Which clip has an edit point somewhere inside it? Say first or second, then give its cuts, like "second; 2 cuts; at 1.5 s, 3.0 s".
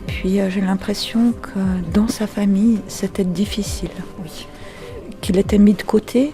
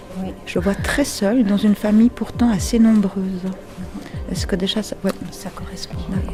first; 1 cut; at 5.1 s